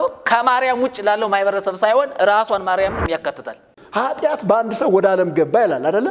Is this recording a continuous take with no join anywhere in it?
no; 1 cut; at 3.8 s

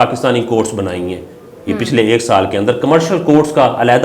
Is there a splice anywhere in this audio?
no; 0 cuts

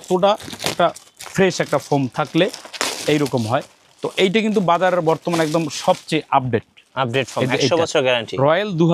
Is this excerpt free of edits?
yes; 0 cuts

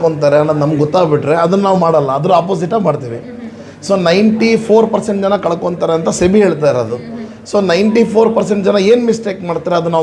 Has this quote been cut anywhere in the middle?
no; 0 cuts

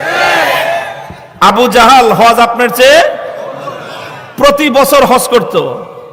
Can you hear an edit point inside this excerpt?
no; 0 cuts

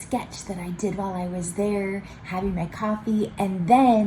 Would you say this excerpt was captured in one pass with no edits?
yes; 0 cuts

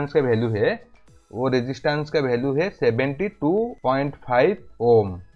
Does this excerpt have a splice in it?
yes; 1 cut; at 3.8 s

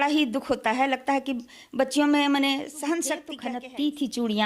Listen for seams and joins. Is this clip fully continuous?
no; 1 cut; at 3.3 s

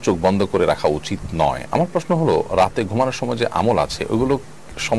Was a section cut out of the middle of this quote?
no; 0 cuts

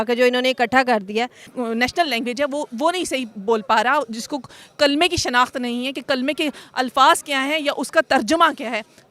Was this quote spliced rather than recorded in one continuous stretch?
yes; 1 cut; at 1.4 s

